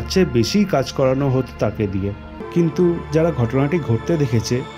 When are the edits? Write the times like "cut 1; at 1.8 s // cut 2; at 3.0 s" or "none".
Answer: cut 1; at 2.4 s

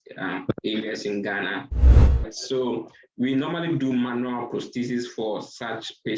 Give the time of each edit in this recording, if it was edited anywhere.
cut 1; at 2.1 s

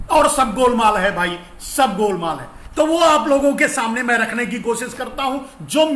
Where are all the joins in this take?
none

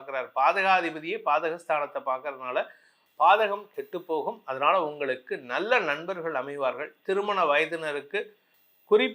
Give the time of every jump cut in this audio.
none

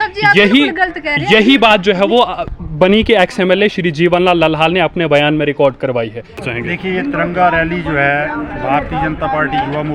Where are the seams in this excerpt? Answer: cut 1; at 6.3 s

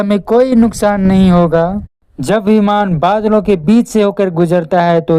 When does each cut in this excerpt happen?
none

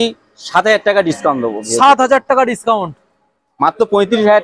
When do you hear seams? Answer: none

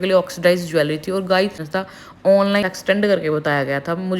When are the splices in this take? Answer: cut 1; at 1.6 s // cut 2; at 2.6 s

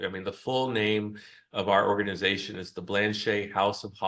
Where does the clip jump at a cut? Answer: none

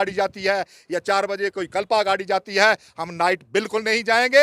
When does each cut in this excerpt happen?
none

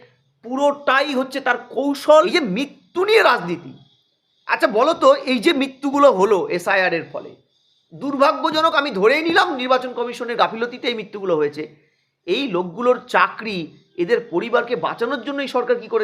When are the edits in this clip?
cut 1; at 2.1 s

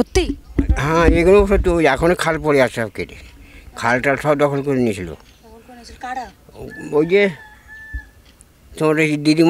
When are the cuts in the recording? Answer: none

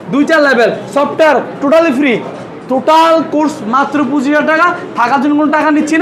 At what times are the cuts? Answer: none

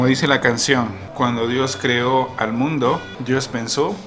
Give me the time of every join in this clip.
cut 1; at 1.0 s // cut 2; at 3.1 s

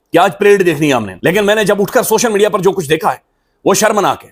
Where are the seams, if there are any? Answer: cut 1; at 1.1 s

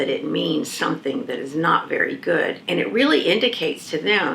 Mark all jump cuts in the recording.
cut 1; at 2.6 s

